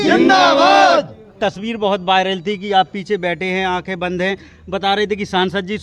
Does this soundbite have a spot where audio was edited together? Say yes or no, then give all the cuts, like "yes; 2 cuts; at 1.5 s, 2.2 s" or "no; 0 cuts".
yes; 1 cut; at 1.3 s